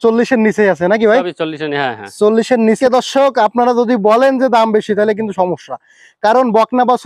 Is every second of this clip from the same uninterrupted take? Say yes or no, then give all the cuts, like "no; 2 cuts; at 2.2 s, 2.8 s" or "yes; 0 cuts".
no; 1 cut; at 2.8 s